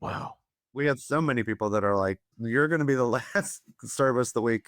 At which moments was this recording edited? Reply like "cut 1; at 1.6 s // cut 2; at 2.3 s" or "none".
cut 1; at 0.8 s // cut 2; at 2.3 s